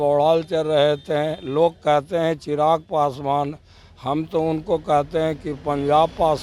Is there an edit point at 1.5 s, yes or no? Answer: no